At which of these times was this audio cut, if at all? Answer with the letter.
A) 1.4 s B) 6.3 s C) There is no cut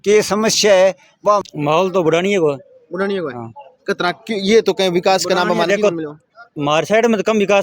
A